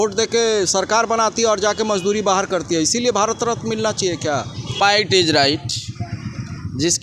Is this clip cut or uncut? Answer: cut